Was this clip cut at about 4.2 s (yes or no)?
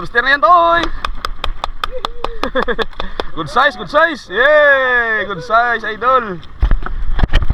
no